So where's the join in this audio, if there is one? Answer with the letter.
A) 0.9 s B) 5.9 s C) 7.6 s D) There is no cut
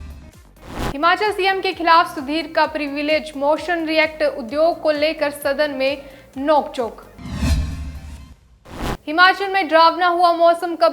A